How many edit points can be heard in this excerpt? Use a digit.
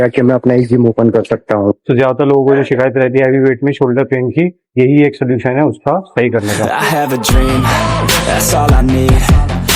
3